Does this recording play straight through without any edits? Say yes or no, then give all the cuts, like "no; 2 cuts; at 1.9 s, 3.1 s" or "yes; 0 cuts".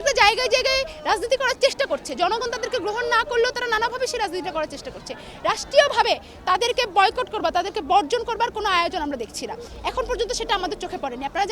yes; 0 cuts